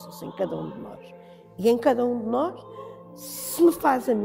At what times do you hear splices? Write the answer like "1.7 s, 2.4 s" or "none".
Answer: none